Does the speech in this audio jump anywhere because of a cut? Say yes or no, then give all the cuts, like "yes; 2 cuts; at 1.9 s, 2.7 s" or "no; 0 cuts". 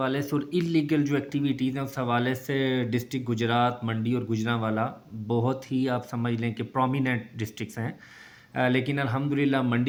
no; 0 cuts